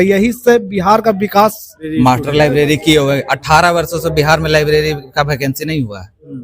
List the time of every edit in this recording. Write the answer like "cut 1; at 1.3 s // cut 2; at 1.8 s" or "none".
cut 1; at 1.8 s